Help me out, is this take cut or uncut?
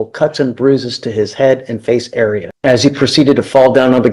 cut